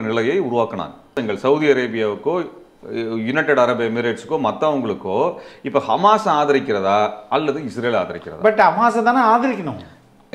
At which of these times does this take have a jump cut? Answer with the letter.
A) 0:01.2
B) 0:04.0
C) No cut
A